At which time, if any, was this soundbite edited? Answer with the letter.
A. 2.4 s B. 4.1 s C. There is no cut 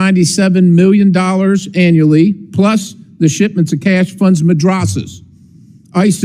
C